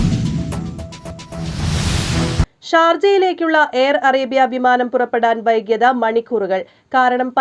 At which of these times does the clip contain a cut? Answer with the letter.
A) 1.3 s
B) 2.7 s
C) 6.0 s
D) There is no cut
A